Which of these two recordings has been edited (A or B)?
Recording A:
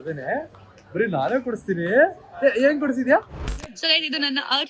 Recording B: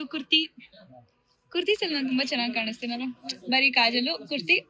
A